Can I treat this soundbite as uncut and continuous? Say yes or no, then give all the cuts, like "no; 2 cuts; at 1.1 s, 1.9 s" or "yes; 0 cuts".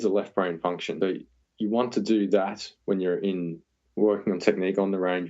no; 1 cut; at 0.9 s